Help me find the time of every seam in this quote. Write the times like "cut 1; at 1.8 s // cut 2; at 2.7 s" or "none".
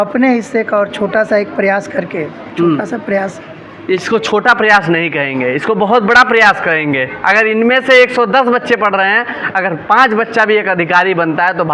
none